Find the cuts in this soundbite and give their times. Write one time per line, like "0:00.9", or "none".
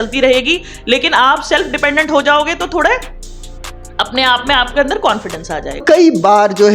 0:05.8